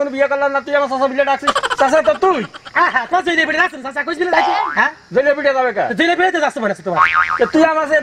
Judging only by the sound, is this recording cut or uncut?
uncut